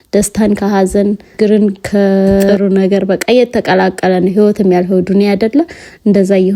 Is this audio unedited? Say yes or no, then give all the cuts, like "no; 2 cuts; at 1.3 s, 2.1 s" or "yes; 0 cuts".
no; 2 cuts; at 1.3 s, 2.5 s